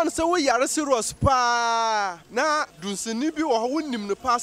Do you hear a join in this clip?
yes; 1 cut; at 2.6 s

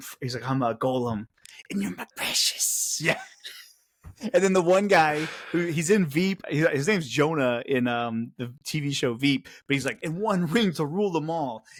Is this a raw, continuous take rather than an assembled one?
yes; 0 cuts

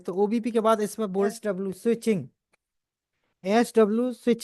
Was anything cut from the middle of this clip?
yes; 1 cut; at 1.4 s

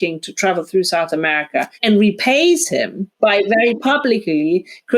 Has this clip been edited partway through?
yes; 2 cuts; at 1.7 s, 3.0 s

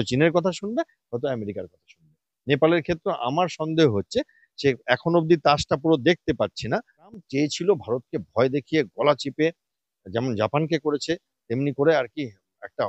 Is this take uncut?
no; 1 cut; at 7.2 s

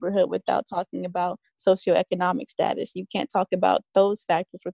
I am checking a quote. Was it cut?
no; 0 cuts

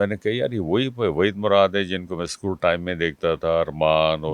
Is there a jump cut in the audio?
no; 0 cuts

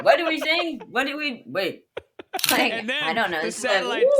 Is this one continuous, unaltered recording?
no; 1 cut; at 2.5 s

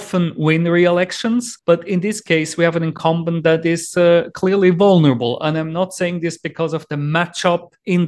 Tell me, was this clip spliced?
no; 0 cuts

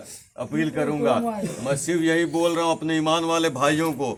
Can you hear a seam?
no; 0 cuts

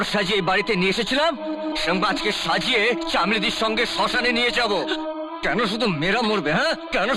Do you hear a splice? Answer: no; 0 cuts

